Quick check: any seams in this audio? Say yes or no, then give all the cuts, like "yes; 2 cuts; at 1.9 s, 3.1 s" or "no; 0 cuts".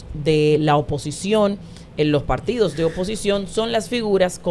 no; 0 cuts